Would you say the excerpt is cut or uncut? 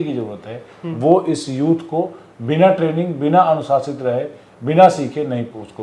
uncut